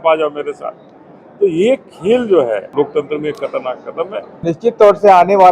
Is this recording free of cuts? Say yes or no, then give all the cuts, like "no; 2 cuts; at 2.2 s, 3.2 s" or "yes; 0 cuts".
no; 2 cuts; at 2.7 s, 4.4 s